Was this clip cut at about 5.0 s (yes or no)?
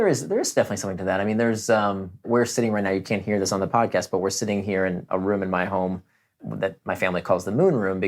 yes